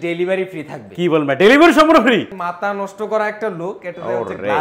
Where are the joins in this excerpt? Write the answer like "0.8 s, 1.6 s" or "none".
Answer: 2.3 s